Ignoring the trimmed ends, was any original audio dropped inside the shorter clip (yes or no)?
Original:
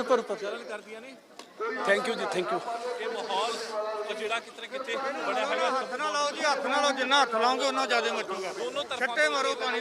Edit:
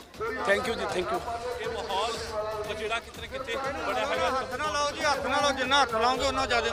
no